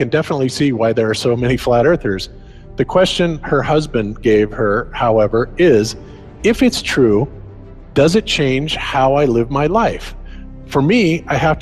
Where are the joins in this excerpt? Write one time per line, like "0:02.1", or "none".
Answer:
0:03.2